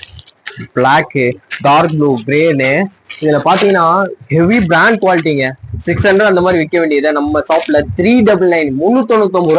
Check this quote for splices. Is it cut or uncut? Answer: uncut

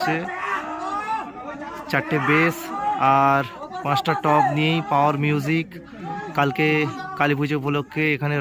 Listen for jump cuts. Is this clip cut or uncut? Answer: uncut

